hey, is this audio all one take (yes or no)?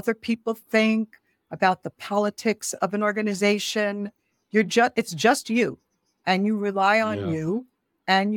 yes